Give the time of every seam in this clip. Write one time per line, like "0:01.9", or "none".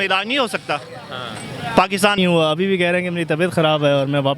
0:02.2